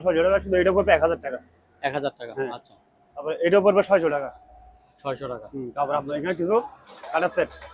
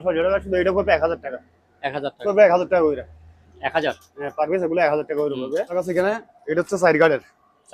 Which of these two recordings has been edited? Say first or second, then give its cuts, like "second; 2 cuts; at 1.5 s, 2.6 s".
second; 2 cuts; at 2.2 s, 5.7 s